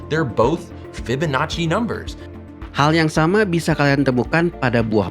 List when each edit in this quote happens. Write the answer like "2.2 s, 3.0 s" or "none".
none